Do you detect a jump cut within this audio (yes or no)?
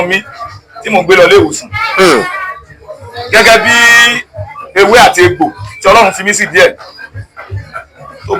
no